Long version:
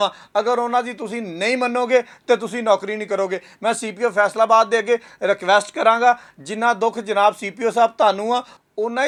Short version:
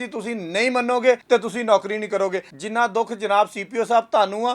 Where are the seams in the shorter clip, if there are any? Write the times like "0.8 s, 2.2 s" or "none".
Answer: 1.2 s, 2.5 s